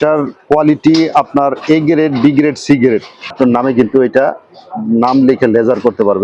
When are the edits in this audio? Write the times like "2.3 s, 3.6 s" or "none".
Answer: 3.3 s